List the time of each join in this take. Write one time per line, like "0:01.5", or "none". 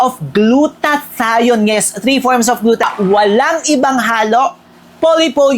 0:02.8